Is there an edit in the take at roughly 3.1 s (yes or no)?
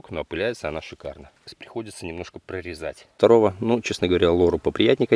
yes